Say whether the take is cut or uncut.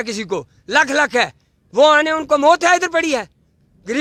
uncut